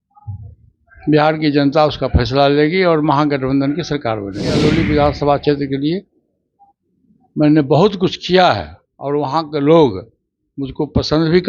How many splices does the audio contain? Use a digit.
1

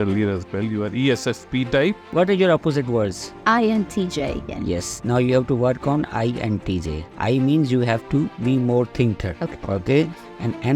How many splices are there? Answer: 4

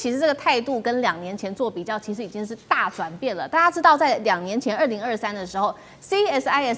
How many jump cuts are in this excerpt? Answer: 0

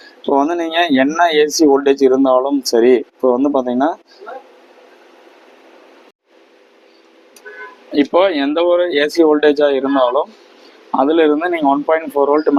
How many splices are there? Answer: 0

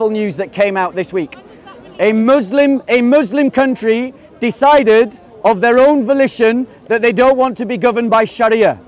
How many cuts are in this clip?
0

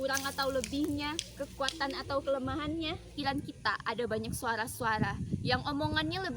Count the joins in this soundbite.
1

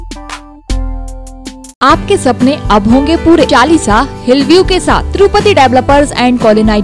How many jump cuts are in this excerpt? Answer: 2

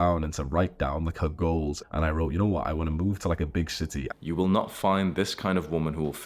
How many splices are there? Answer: 2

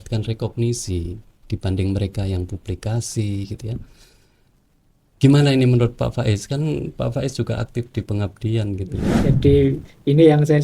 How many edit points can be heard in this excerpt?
1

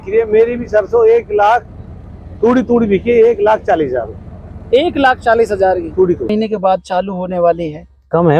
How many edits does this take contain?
1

